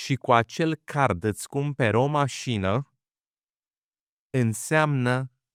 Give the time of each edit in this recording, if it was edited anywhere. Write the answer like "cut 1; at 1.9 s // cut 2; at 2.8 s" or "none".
none

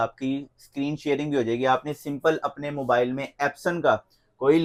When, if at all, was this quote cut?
none

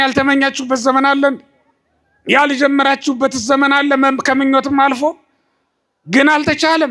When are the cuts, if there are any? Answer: none

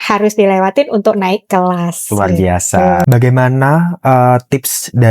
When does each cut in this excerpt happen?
cut 1; at 3.0 s

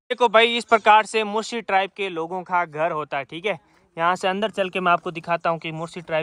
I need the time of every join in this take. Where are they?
none

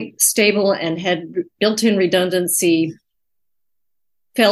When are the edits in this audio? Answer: none

